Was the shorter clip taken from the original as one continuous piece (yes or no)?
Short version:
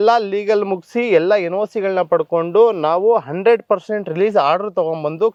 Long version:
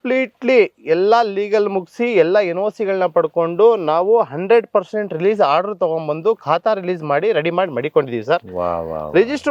yes